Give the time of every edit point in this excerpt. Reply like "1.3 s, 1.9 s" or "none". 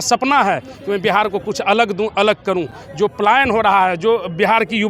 none